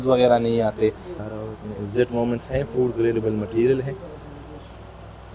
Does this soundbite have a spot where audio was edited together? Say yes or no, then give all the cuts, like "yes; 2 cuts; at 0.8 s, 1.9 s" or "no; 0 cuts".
no; 0 cuts